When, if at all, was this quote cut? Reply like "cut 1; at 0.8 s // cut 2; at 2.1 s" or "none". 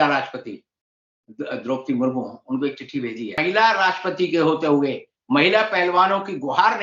cut 1; at 3.4 s